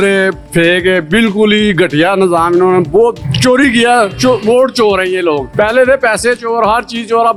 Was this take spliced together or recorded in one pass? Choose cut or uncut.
uncut